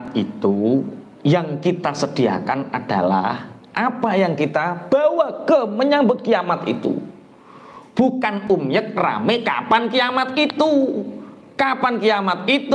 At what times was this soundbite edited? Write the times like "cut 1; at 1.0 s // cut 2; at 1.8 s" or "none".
none